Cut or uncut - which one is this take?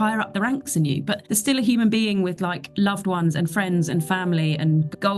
cut